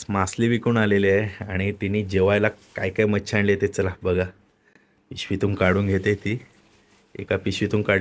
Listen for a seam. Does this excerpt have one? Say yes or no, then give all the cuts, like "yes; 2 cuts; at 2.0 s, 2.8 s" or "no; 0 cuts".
no; 0 cuts